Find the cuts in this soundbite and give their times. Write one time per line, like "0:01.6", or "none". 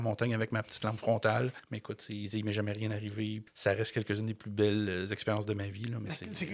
0:01.7
0:03.5